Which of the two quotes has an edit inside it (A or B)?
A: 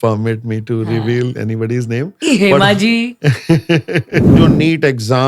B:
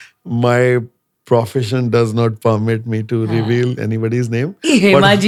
A